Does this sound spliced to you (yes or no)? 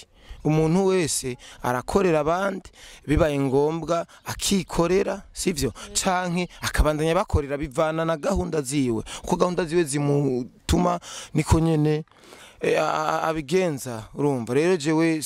no